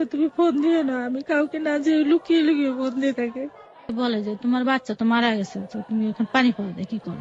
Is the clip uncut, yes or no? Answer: no